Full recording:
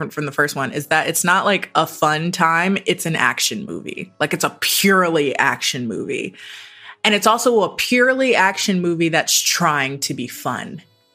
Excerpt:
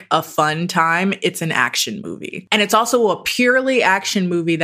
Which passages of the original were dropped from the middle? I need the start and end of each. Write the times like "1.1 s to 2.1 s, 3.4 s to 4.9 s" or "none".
4.0 s to 6.8 s